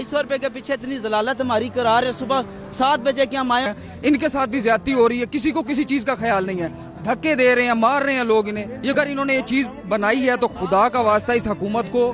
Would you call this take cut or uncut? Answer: cut